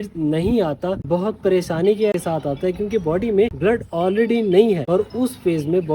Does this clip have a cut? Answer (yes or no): yes